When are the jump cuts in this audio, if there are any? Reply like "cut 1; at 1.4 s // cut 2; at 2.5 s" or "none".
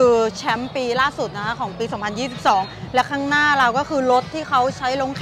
none